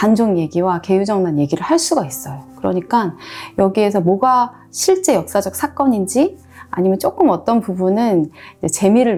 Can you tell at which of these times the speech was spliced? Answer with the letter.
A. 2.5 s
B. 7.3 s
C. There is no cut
C